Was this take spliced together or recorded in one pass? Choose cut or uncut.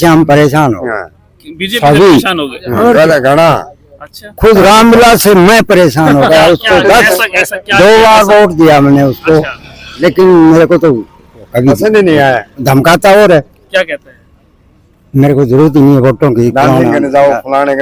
uncut